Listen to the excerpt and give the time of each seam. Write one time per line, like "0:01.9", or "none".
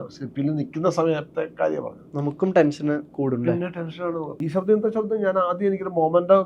0:04.3